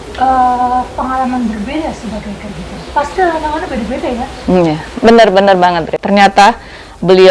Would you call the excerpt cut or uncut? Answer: cut